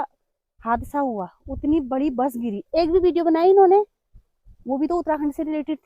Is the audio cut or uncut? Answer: uncut